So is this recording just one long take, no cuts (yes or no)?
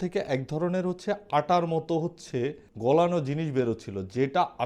no